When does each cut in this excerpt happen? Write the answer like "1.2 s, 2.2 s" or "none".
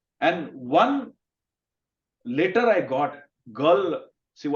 3.3 s